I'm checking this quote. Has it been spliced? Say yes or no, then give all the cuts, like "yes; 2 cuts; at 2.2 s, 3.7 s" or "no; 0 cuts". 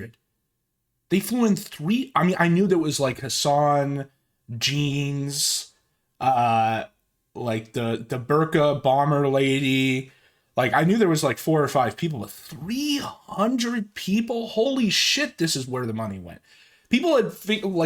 no; 0 cuts